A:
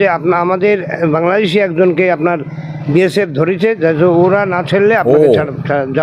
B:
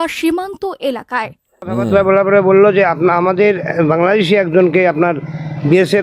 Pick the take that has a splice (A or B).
B